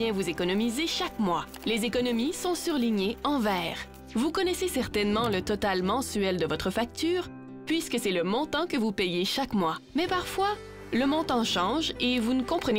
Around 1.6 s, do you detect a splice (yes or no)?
no